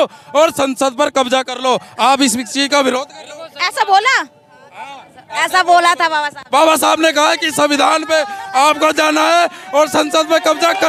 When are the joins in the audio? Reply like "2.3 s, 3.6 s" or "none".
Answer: none